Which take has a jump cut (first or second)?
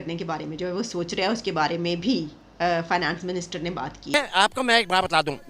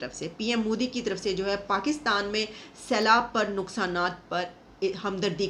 first